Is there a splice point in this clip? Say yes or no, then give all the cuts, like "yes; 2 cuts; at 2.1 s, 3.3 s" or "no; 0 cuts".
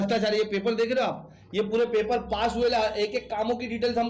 no; 0 cuts